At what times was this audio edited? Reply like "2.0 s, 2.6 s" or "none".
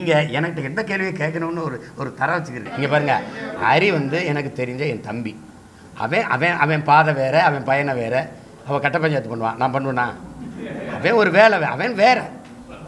2.7 s

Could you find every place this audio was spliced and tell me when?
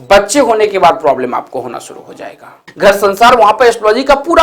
2.7 s

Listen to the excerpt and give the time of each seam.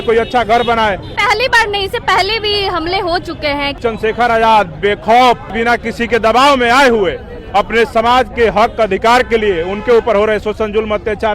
1.1 s, 3.7 s, 5.5 s

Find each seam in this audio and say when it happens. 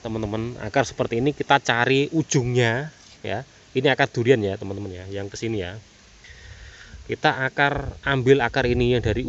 none

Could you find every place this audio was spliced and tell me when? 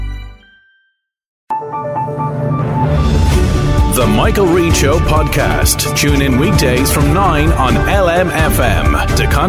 1.3 s

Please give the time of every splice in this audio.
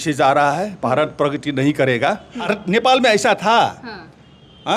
2.5 s

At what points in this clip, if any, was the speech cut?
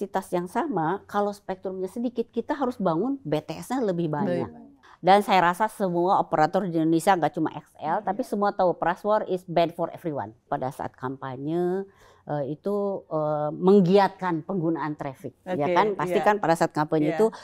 4.9 s, 10.4 s

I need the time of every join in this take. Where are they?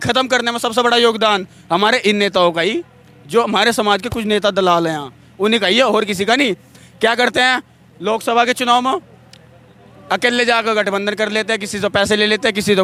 none

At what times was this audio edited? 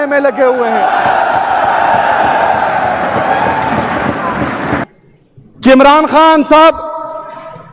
4.9 s

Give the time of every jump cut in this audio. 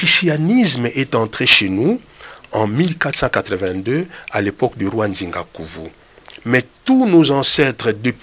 none

